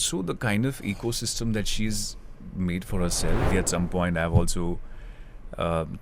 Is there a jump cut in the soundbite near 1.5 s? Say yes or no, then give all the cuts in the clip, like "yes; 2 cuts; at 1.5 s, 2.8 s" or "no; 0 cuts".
no; 1 cut; at 3.5 s